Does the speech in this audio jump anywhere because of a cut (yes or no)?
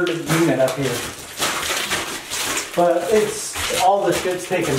no